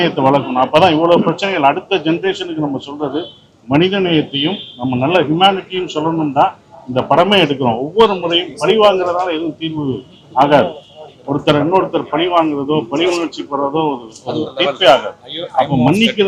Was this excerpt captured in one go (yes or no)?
yes